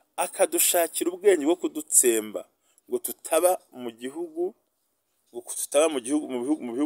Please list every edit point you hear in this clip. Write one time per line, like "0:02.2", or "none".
none